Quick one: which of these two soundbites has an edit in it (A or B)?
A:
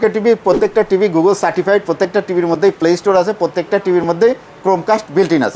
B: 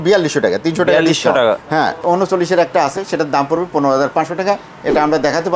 B